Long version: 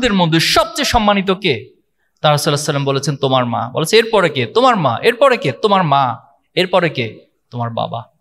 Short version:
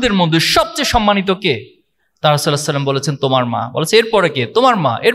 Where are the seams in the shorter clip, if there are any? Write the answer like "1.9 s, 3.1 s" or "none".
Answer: none